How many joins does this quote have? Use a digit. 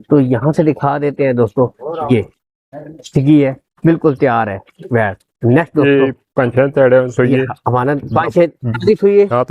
0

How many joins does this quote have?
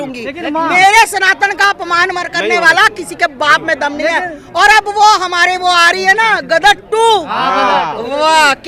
0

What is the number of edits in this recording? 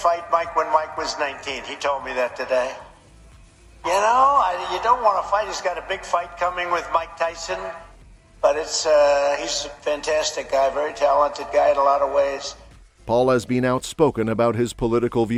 0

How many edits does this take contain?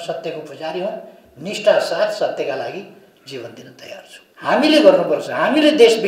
1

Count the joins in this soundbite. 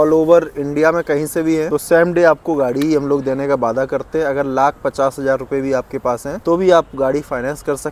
2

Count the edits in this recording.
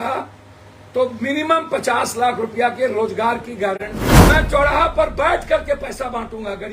1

